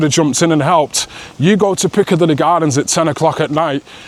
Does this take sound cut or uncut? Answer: uncut